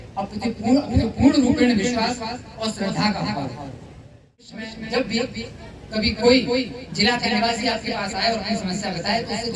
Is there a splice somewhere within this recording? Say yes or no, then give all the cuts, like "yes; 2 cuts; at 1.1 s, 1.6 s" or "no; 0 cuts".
yes; 1 cut; at 4.8 s